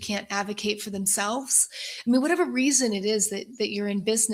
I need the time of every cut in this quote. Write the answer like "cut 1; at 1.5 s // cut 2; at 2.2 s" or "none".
none